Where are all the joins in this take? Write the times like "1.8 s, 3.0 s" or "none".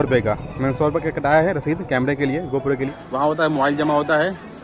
3.0 s